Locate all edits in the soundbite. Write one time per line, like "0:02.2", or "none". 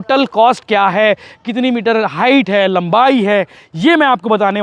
none